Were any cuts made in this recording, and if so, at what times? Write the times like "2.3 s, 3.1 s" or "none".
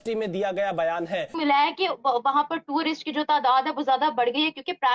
1.3 s